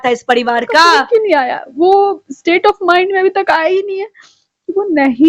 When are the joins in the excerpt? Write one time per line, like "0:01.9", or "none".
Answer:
0:01.1